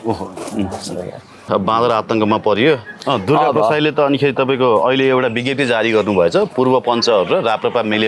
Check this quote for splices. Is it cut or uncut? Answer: cut